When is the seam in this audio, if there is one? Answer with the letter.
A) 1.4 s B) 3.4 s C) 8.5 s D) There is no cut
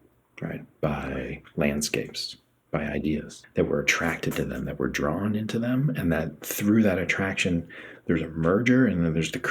B